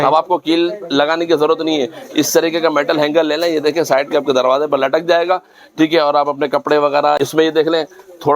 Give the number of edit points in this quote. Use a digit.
1